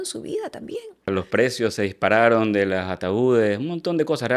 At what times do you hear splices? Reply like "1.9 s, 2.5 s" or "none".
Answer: 1.1 s